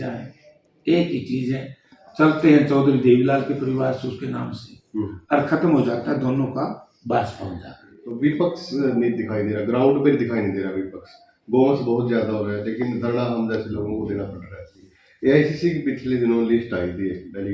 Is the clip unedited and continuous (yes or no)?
no